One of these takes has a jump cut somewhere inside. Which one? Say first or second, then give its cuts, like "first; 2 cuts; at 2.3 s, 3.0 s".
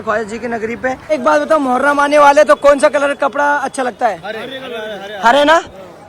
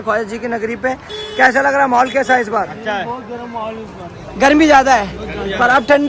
first; 1 cut; at 1.1 s